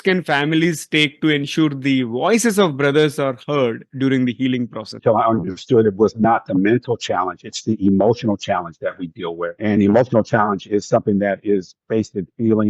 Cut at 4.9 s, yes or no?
yes